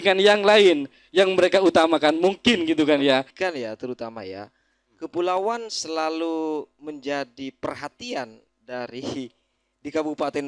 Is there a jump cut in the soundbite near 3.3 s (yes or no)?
yes